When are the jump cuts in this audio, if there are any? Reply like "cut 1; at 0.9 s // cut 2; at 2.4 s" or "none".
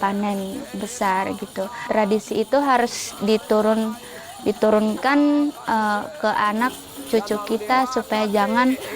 cut 1; at 1.8 s